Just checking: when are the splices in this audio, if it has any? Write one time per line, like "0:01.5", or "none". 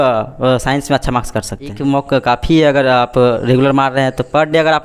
0:01.8